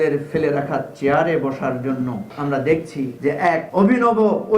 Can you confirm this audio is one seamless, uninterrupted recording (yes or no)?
no